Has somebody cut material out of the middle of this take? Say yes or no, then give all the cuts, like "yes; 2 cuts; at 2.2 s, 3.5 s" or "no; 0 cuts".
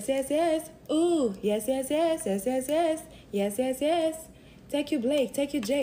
no; 0 cuts